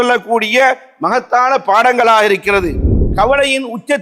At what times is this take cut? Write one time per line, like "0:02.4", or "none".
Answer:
0:03.0